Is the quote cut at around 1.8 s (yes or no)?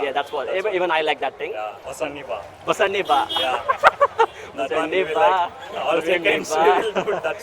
yes